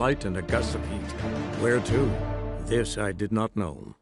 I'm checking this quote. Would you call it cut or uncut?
uncut